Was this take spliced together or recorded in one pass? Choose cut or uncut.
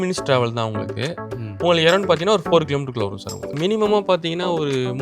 cut